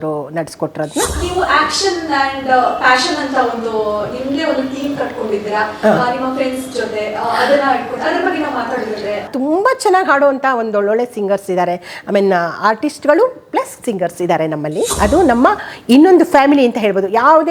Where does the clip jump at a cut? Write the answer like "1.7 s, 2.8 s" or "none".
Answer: 1.2 s, 9.3 s, 14.9 s